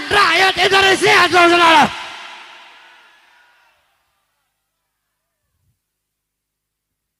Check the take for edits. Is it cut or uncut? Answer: uncut